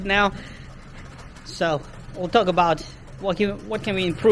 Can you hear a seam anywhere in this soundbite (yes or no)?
no